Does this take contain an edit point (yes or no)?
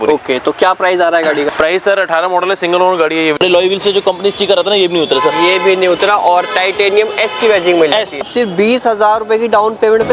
yes